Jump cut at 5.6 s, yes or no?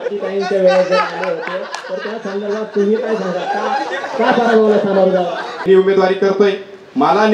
yes